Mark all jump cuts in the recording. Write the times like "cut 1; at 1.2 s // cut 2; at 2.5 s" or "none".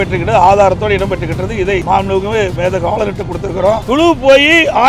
cut 1; at 1.8 s // cut 2; at 3.8 s